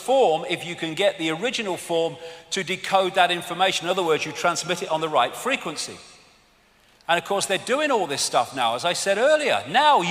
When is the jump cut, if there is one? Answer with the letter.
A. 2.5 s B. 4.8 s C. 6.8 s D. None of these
C